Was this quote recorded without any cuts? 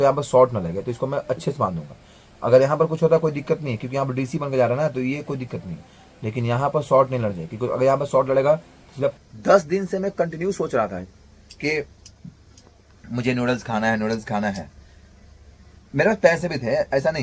no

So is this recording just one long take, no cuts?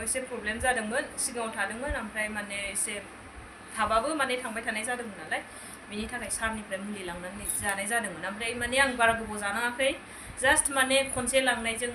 yes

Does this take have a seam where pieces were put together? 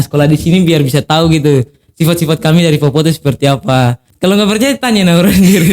yes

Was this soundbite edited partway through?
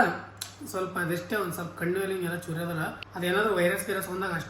yes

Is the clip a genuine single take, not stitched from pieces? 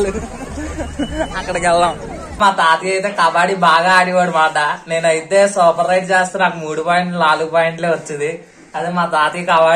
no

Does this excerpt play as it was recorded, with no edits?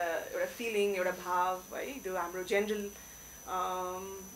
yes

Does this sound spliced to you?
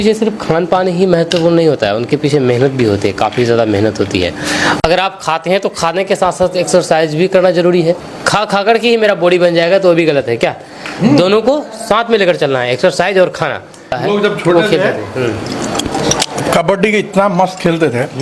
yes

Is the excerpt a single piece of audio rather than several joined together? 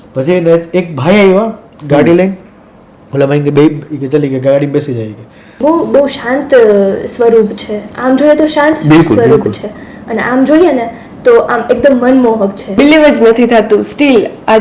no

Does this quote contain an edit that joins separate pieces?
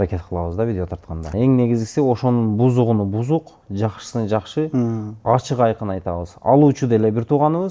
yes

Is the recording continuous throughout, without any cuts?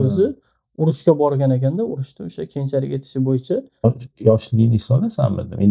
no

